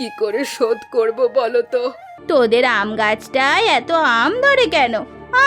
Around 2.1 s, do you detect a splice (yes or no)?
yes